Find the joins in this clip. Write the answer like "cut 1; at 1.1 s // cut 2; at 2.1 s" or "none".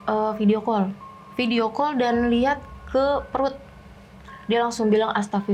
none